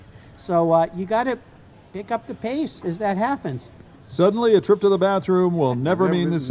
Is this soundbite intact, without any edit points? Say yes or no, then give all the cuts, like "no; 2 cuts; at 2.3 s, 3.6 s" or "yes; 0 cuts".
yes; 0 cuts